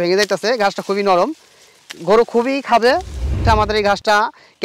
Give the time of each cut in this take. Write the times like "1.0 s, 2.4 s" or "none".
3.4 s